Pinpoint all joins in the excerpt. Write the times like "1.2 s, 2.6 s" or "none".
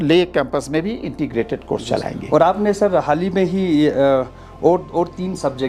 none